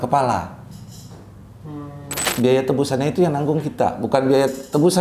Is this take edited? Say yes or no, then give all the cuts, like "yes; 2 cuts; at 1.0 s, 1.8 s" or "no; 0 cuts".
yes; 1 cut; at 2.3 s